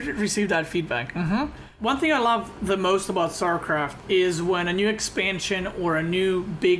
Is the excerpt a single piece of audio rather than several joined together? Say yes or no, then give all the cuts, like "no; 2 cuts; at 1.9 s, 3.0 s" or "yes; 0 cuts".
no; 1 cut; at 1.7 s